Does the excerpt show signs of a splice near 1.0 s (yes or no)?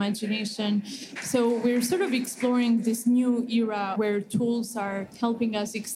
yes